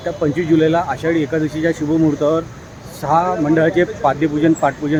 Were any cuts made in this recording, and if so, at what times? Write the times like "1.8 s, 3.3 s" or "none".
none